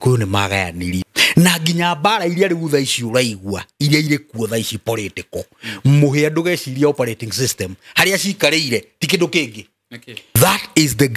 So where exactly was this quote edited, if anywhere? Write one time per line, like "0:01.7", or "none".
0:01.1
0:10.4